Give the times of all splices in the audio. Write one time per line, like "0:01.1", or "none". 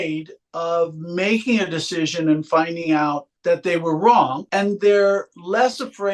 0:03.3
0:04.4